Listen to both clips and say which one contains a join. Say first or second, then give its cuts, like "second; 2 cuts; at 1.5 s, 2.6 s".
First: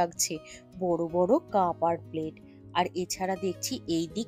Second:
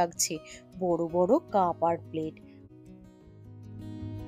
second; 1 cut; at 2.5 s